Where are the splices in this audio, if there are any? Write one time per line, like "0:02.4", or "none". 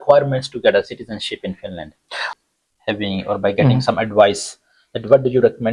0:02.3